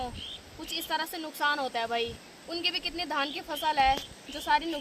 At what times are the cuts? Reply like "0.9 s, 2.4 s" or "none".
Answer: 2.3 s